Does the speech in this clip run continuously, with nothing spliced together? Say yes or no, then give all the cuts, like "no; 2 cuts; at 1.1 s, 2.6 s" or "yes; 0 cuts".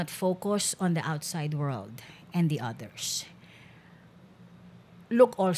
yes; 0 cuts